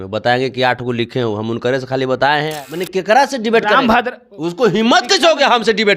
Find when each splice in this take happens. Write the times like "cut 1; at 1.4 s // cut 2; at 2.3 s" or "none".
cut 1; at 2.6 s